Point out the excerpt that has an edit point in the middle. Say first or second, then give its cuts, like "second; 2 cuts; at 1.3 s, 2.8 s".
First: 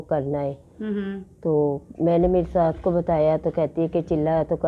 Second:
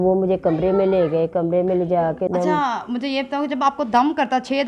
second; 1 cut; at 2.3 s